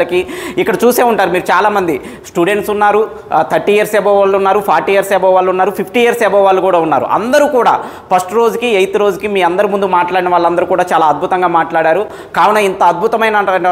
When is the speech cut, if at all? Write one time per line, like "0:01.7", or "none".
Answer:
none